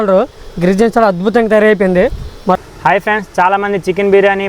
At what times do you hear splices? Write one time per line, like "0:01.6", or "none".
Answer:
0:02.7